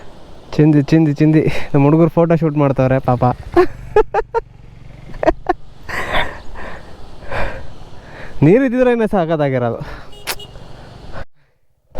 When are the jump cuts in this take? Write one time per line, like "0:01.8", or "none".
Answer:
none